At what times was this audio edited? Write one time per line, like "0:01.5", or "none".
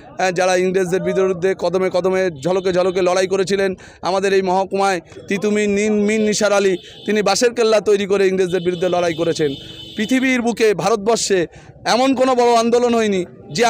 none